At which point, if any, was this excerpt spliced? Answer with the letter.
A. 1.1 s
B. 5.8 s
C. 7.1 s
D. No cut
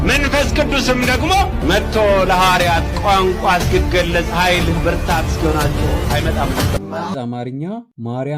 C